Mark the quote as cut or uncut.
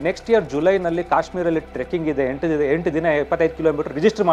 uncut